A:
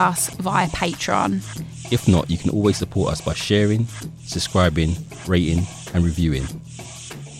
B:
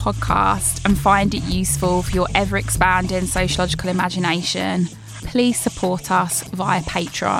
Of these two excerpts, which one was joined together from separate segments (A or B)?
A